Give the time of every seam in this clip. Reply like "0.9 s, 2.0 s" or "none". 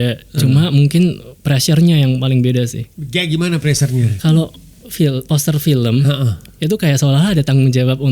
4.1 s